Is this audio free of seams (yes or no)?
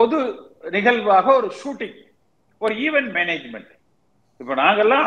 yes